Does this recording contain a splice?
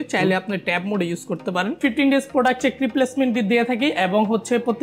yes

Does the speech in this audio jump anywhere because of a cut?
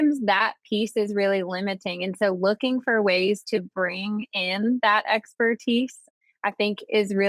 yes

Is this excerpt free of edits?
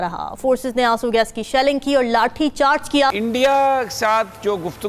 no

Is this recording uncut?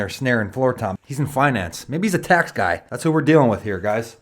no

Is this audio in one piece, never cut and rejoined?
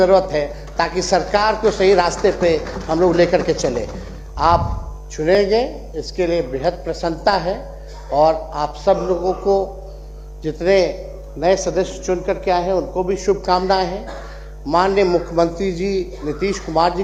yes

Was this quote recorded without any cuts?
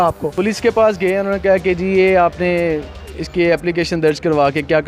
yes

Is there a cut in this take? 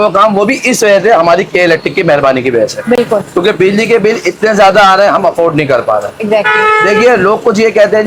no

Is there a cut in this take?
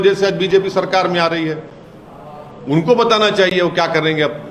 no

